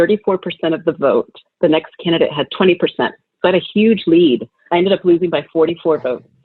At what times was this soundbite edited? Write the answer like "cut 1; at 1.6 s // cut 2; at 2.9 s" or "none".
cut 1; at 1.4 s // cut 2; at 2.5 s // cut 3; at 4.6 s

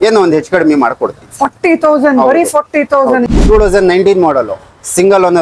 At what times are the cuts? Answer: cut 1; at 3.2 s

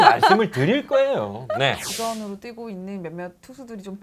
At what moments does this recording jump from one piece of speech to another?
cut 1; at 1.9 s

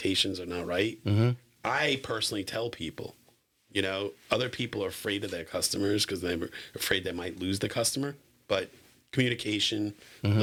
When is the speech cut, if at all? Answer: none

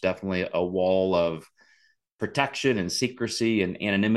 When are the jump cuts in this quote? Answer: none

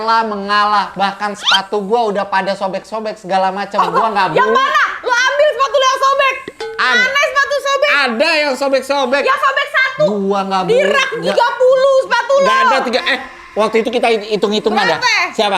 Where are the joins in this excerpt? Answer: none

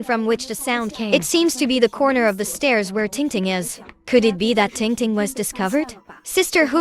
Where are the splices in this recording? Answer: cut 1; at 1.1 s

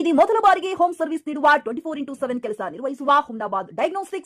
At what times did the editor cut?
none

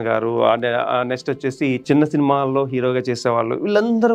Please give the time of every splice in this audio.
cut 1; at 1.8 s

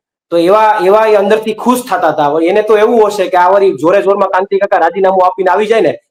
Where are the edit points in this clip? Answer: none

